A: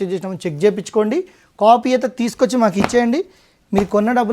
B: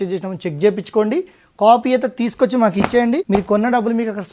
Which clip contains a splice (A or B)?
B